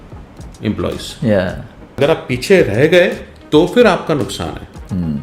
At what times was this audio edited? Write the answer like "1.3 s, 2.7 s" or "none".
2.0 s